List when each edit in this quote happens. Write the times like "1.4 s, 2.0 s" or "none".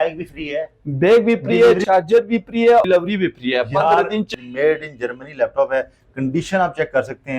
1.8 s, 2.9 s, 4.3 s